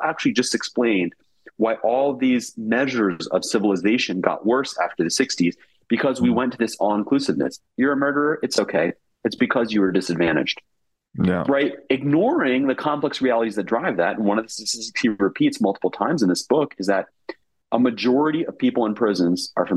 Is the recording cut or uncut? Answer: uncut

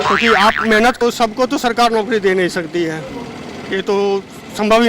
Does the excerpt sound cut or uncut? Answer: cut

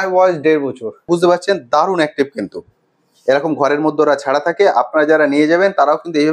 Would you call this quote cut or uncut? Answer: cut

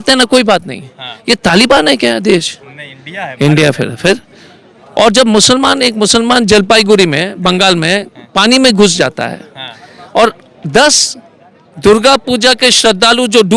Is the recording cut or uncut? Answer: uncut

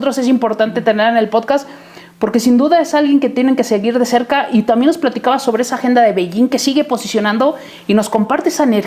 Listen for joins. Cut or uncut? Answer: uncut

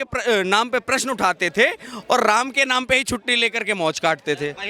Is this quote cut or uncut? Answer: uncut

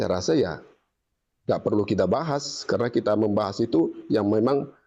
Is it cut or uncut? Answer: uncut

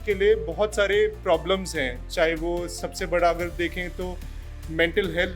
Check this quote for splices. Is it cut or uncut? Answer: uncut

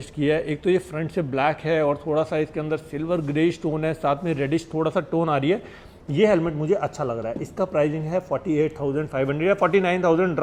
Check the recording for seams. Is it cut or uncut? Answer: uncut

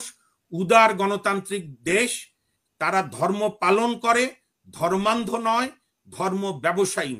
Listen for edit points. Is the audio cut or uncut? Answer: uncut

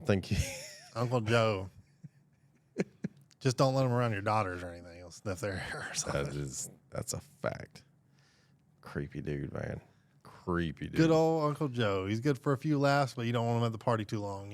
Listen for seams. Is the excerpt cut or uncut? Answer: cut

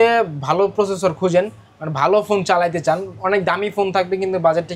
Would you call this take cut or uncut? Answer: uncut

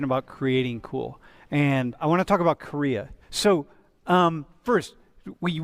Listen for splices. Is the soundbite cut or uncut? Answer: uncut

